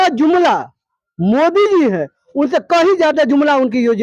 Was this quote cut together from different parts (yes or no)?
no